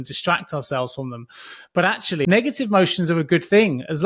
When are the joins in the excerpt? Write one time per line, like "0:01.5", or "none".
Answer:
0:02.2